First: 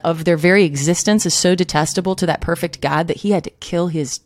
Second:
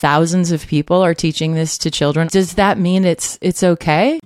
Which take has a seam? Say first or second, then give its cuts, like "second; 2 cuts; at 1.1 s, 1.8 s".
second; 2 cuts; at 2.3 s, 3.3 s